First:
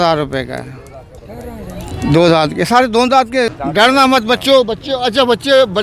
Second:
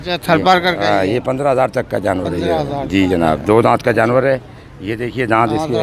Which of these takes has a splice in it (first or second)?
first